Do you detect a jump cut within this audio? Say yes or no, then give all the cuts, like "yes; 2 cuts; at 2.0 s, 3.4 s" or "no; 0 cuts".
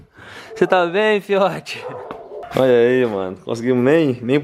yes; 1 cut; at 2.4 s